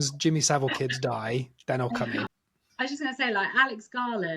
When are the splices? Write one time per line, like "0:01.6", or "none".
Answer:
0:02.1